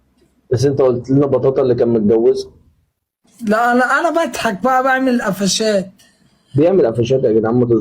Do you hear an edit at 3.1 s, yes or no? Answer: no